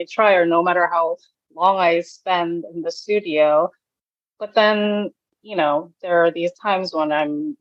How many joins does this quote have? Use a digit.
0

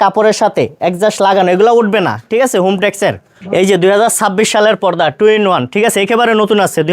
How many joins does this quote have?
1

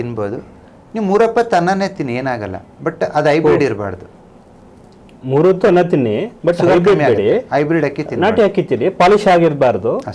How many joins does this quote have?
0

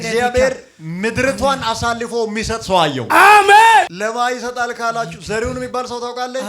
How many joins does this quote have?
1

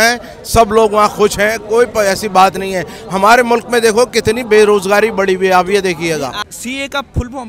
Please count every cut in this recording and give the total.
1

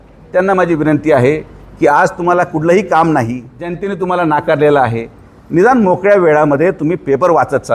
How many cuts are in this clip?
1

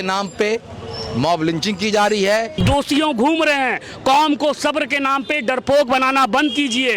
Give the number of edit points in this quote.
1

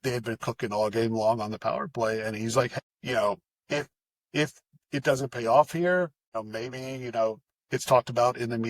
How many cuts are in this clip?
2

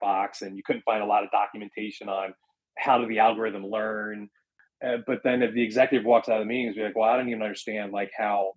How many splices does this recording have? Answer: 1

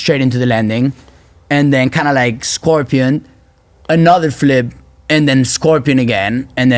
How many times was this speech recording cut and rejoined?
0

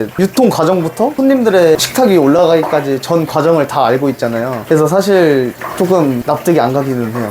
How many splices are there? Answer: 3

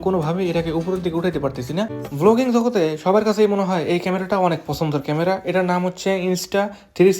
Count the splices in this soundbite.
1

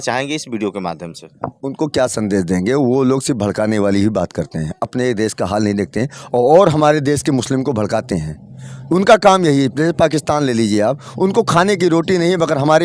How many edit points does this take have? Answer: 0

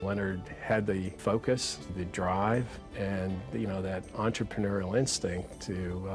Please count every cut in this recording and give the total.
3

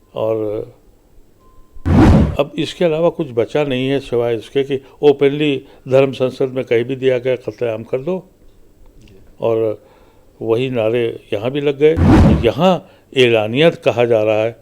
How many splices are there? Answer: 1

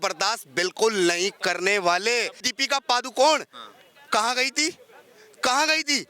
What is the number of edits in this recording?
1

